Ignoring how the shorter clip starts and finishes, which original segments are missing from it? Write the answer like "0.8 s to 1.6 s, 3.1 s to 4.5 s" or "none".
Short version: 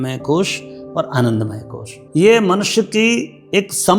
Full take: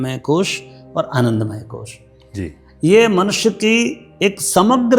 1.9 s to 2.6 s